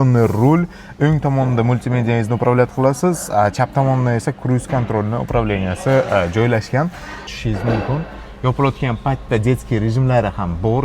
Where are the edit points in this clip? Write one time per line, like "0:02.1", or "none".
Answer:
0:07.4